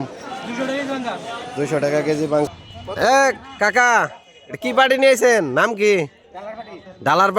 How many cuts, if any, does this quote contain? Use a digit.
1